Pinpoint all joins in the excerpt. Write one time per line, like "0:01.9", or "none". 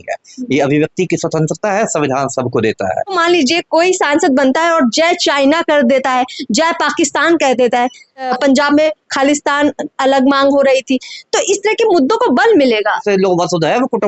0:03.2
0:08.3
0:13.0